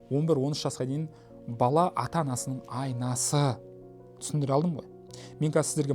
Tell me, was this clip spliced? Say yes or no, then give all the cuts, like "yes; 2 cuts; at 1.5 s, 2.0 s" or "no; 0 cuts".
no; 0 cuts